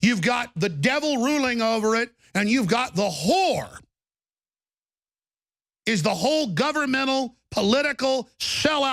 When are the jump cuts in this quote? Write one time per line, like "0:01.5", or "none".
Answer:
none